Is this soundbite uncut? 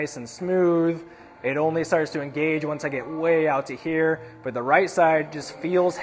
yes; 0 cuts

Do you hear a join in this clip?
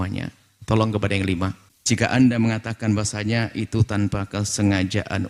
yes; 1 cut; at 1.7 s

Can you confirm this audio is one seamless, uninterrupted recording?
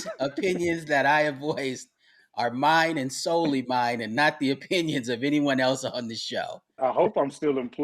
no; 1 cut; at 6.8 s

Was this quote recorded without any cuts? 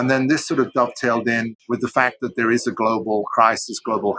no; 1 cut; at 1.5 s

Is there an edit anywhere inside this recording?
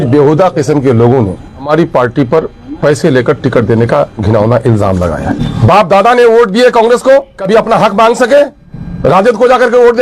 yes; 1 cut; at 5.4 s

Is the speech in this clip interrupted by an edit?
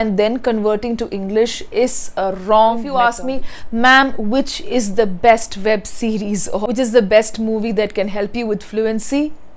yes; 2 cuts; at 2.9 s, 6.6 s

